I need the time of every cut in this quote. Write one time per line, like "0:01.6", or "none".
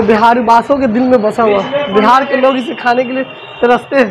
none